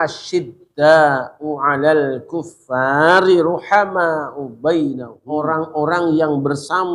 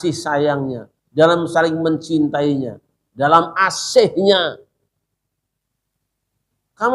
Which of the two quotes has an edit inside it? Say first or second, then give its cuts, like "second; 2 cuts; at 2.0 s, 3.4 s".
first; 1 cut; at 5.1 s